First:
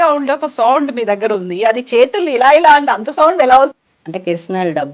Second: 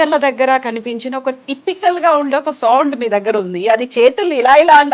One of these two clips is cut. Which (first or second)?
first